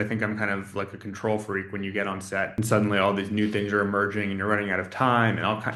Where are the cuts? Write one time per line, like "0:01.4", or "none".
0:02.5